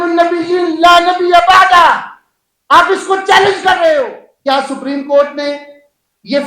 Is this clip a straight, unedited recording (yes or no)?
no